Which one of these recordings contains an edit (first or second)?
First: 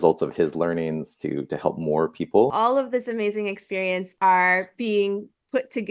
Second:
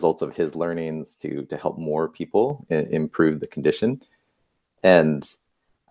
first